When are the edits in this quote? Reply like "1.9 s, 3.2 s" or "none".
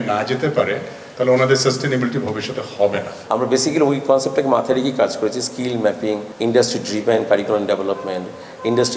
3.2 s, 6.3 s